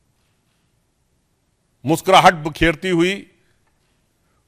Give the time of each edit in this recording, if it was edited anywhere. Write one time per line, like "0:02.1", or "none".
none